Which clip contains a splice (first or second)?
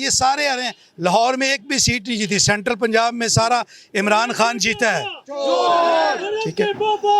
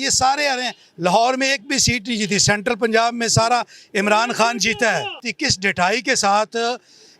second